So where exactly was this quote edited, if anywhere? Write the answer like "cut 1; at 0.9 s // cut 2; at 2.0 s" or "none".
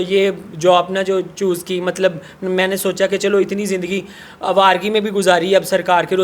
none